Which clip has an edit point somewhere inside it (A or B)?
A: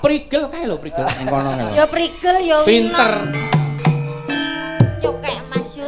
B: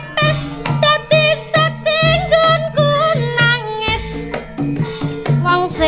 A